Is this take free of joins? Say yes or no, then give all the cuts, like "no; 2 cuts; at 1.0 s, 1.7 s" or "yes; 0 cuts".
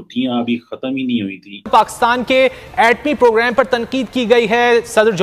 no; 1 cut; at 1.7 s